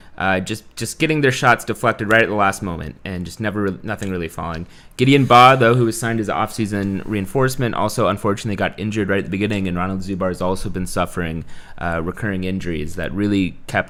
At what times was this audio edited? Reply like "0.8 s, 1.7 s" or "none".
none